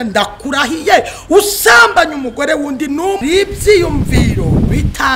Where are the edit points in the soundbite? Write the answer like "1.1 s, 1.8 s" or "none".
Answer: 3.2 s